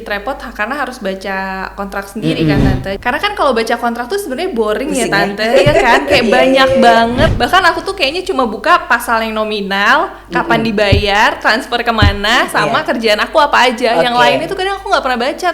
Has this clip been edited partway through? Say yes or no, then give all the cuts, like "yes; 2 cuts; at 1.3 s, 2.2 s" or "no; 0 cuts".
yes; 2 cuts; at 3.0 s, 7.3 s